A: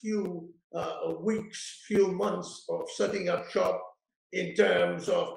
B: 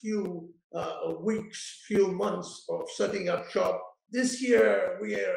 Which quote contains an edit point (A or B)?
B